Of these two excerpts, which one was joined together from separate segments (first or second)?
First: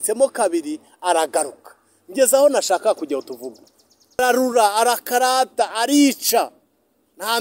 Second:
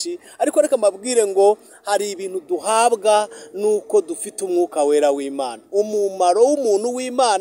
first